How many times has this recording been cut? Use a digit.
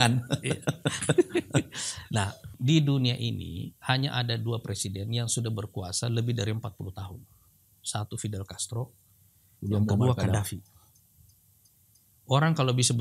1